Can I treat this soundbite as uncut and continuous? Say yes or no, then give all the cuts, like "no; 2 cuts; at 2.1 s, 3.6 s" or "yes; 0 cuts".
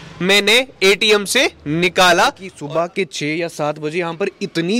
no; 1 cut; at 2.5 s